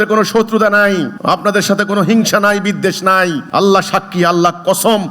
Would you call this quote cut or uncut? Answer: cut